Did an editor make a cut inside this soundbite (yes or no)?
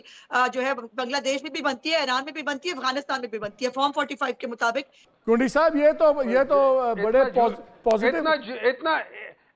no